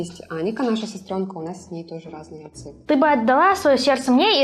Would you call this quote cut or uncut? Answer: cut